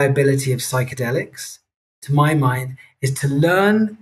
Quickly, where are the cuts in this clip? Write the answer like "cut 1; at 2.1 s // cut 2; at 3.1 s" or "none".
none